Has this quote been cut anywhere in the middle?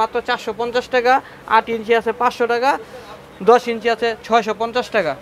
no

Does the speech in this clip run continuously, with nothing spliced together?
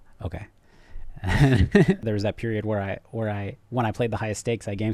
no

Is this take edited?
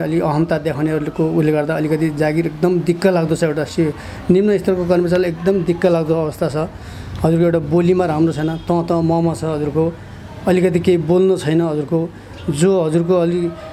no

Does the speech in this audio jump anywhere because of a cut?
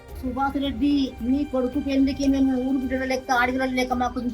yes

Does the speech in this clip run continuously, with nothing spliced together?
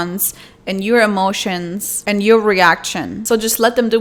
yes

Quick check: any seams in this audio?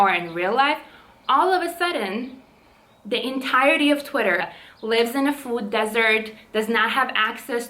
yes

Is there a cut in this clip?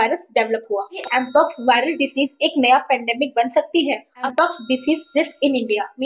yes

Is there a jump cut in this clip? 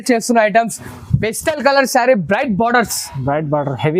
no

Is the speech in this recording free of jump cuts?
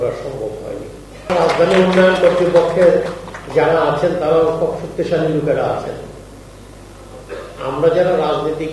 no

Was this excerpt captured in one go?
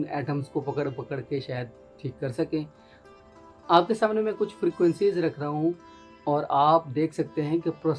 no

